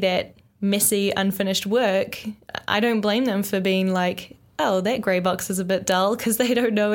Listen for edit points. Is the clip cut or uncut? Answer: uncut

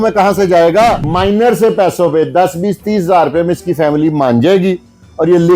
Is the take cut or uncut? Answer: cut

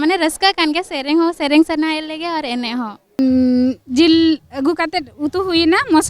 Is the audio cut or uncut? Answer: cut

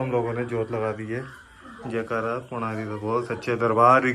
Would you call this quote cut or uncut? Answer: uncut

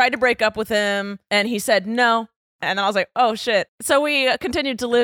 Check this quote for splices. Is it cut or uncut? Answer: cut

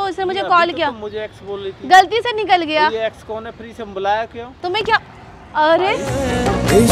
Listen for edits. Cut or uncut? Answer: cut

